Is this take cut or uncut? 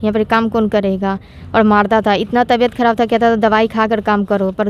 uncut